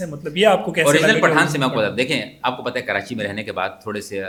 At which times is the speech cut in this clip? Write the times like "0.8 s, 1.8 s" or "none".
none

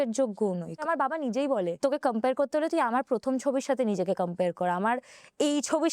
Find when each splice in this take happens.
0.8 s, 1.8 s

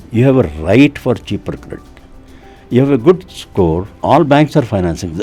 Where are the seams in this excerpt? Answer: 3.9 s

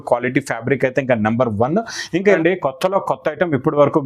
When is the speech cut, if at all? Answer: 2.4 s

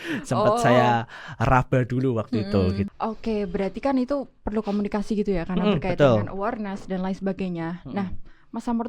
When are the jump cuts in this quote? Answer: 2.9 s

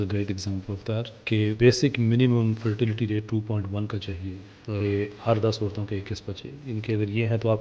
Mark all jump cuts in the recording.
1.5 s

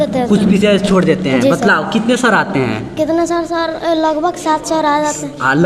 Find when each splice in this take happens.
none

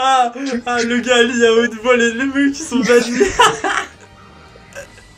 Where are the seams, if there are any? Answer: none

